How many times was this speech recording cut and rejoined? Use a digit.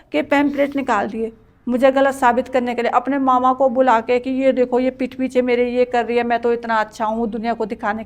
0